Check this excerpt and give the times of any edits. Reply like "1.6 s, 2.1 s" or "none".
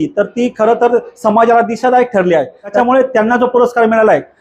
2.7 s